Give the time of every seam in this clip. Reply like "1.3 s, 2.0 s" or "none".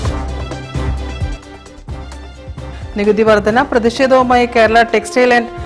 2.7 s